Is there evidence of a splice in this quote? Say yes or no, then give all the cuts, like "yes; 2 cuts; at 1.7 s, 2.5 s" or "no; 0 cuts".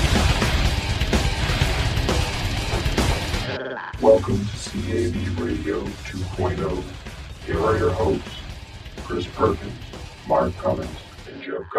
yes; 1 cut; at 3.9 s